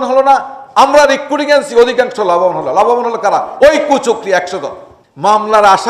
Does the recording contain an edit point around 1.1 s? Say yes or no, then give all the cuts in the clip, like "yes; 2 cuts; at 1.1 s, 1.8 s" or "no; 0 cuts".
no; 1 cut; at 4.9 s